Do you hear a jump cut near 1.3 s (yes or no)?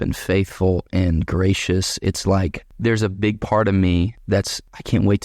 no